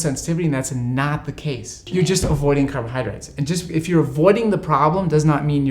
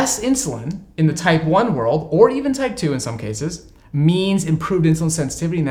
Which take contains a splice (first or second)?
first